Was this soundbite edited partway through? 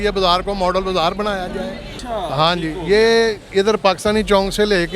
yes; 1 cut; at 1.9 s

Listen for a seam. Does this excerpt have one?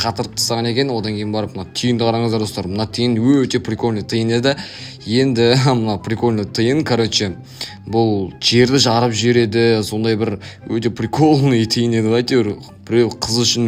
no; 0 cuts

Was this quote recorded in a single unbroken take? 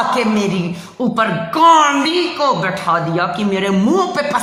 yes; 0 cuts

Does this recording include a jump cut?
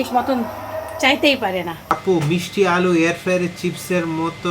yes; 1 cut; at 1.9 s

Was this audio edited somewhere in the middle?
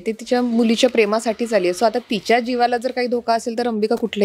no; 0 cuts

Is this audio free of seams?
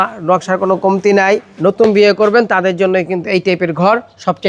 no; 1 cut; at 1.5 s

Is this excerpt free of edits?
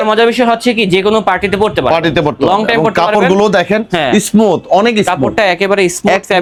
yes; 0 cuts

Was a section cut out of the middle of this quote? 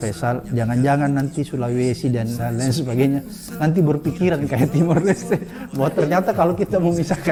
no; 0 cuts

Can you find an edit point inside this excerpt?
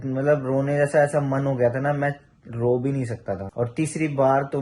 yes; 1 cut; at 3.5 s

